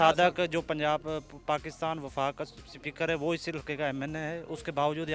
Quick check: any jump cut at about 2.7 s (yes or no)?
no